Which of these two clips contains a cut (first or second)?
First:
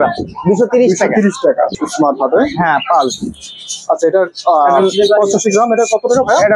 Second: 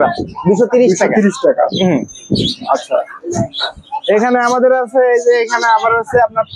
first